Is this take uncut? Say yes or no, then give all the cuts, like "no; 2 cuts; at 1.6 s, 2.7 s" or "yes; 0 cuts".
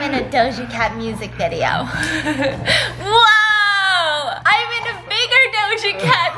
yes; 0 cuts